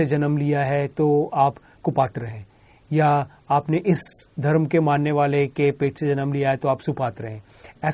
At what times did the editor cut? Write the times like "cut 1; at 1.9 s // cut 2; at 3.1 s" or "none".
none